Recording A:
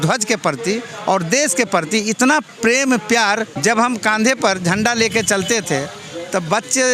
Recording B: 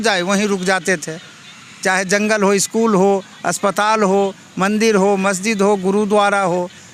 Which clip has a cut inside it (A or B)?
A